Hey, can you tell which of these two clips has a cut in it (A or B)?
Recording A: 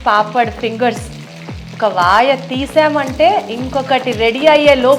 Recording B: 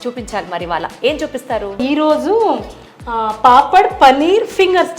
B